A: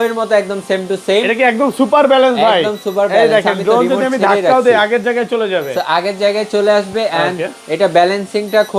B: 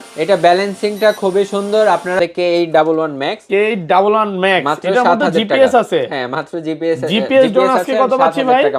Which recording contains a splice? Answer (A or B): B